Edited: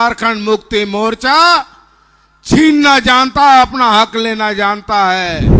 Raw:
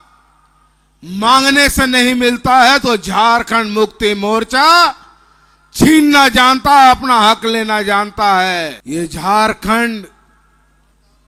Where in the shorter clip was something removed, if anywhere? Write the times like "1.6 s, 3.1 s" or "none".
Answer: none